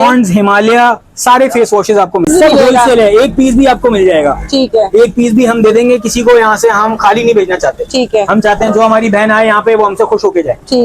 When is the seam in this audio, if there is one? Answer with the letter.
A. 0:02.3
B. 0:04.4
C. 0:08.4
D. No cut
A